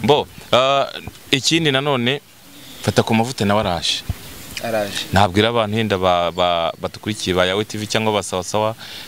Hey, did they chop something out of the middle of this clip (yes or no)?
no